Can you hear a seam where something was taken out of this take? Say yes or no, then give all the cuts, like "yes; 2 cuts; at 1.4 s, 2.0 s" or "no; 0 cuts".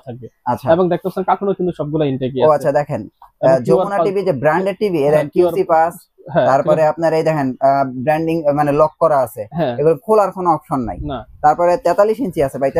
no; 0 cuts